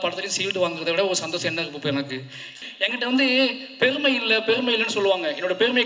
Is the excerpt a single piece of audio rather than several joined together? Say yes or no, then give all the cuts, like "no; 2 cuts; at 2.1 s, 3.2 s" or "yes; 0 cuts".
no; 1 cut; at 2.5 s